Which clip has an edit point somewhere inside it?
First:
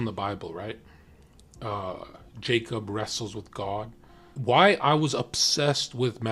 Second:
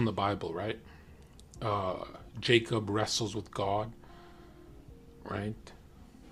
first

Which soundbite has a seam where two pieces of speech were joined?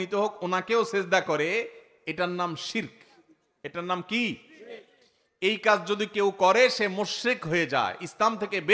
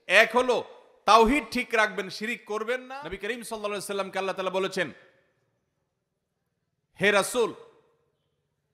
second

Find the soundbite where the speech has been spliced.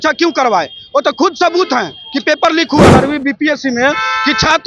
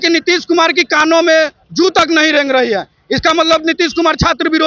first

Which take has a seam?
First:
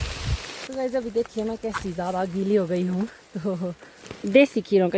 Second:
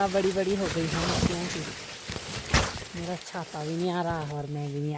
first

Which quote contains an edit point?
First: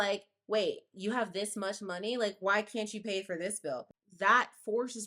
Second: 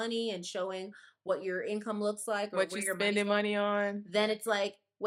first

